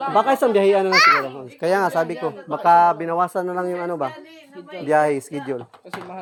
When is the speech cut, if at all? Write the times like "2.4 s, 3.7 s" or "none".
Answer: none